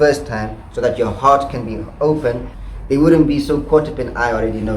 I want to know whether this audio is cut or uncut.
cut